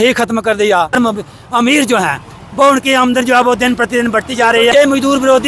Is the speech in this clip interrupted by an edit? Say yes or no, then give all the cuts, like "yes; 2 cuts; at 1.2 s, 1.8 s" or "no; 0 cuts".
yes; 2 cuts; at 1.0 s, 4.7 s